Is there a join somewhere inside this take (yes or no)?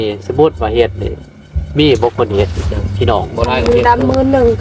yes